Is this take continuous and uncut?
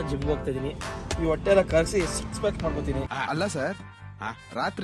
no; 1 cut; at 3.1 s

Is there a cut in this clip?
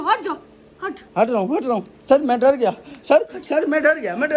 no; 0 cuts

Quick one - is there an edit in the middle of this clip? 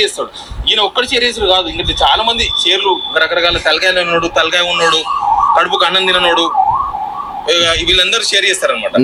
no; 0 cuts

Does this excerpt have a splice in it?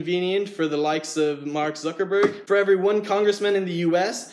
yes; 1 cut; at 2.4 s

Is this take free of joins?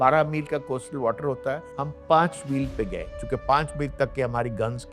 yes; 0 cuts

